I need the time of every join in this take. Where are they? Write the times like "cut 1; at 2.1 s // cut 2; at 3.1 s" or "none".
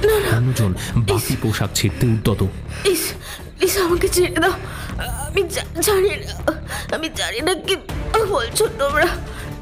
cut 1; at 2.6 s